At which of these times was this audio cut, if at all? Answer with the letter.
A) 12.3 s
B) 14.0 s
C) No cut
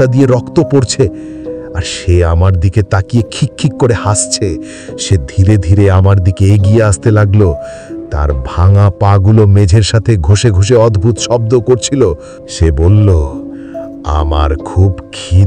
A